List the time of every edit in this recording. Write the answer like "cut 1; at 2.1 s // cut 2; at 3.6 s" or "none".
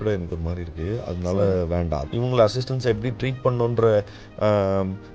cut 1; at 2.1 s